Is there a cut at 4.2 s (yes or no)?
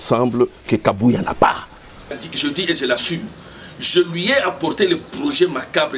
no